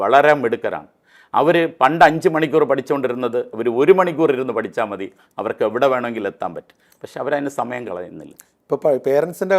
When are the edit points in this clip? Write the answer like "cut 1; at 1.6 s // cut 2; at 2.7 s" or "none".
none